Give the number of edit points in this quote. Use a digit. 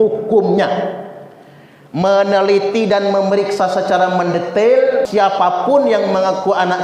1